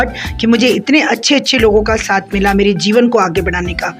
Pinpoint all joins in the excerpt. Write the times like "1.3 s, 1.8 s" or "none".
none